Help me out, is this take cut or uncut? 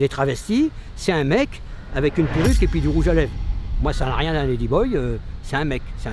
uncut